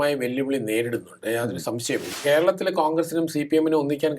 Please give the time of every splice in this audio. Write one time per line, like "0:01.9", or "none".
0:02.1